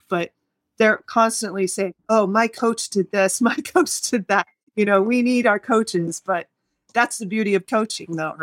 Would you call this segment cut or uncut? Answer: uncut